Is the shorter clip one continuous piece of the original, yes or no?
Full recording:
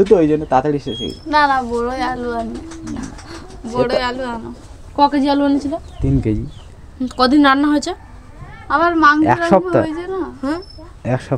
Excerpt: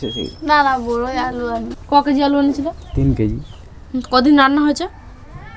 no